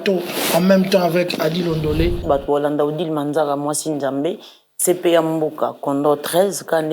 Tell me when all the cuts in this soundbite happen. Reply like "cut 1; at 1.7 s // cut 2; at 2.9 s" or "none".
cut 1; at 2.2 s